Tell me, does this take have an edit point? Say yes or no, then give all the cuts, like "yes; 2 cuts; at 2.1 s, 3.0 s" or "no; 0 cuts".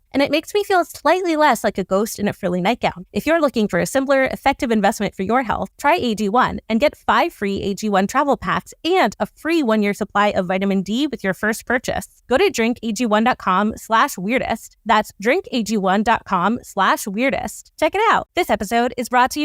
yes; 2 cuts; at 3.0 s, 18.3 s